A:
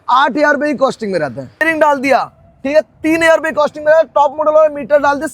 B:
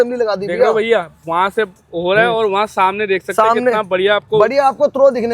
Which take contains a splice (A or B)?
A